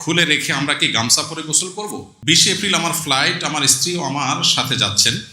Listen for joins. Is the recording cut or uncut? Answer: cut